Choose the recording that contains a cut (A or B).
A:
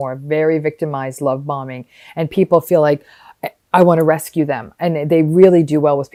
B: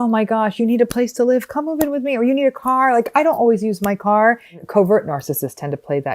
B